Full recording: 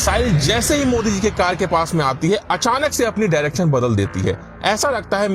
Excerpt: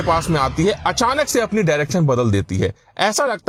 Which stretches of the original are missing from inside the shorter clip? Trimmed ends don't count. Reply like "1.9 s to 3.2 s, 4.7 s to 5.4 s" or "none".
none